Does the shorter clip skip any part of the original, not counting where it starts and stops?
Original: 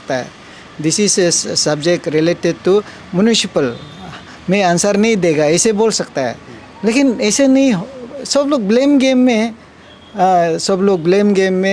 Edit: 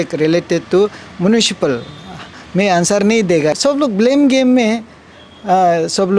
yes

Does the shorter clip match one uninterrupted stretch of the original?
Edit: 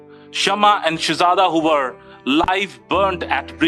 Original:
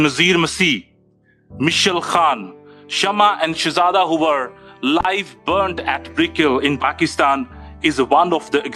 yes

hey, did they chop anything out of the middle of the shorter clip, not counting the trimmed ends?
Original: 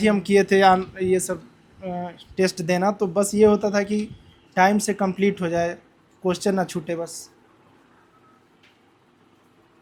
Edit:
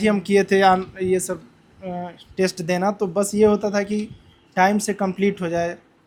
no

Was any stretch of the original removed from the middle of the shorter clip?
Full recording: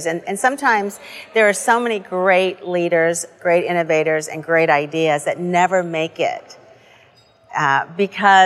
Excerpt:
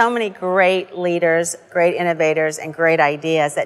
no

